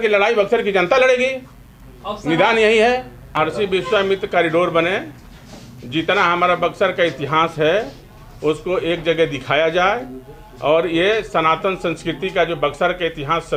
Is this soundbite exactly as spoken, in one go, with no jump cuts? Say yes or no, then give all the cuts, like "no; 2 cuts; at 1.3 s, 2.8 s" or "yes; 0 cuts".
no; 1 cut; at 3.2 s